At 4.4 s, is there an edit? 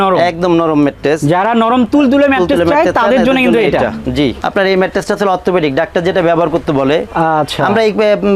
yes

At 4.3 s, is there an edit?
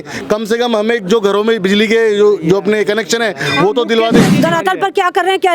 yes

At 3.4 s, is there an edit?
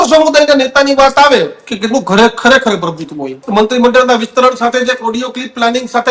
yes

